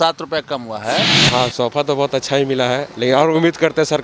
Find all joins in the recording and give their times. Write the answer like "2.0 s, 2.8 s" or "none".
1.2 s